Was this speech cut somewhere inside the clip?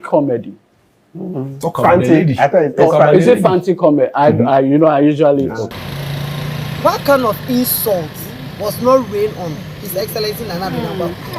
yes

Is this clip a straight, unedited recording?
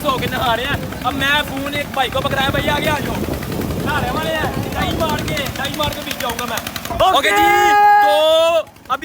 no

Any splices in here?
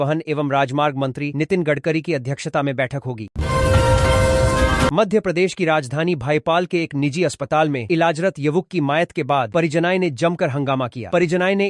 no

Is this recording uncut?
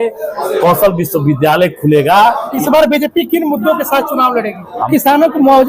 no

